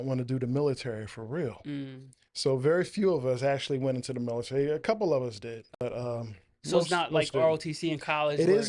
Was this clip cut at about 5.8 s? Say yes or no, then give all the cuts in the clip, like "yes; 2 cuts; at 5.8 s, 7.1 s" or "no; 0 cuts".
yes; 1 cut; at 5.8 s